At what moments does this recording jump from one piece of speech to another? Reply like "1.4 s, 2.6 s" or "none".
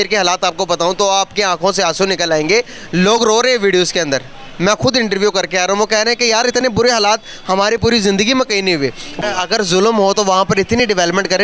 9.2 s